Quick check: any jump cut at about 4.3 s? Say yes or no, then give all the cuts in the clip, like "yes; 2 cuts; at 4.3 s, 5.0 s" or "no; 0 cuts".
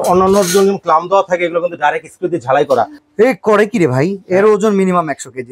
no; 1 cut; at 3.0 s